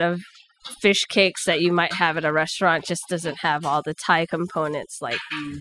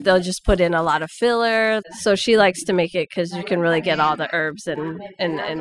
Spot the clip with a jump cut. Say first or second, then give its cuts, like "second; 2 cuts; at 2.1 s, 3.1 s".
second; 1 cut; at 1.8 s